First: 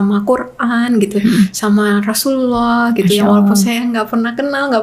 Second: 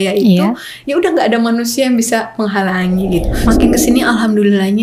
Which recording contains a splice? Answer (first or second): second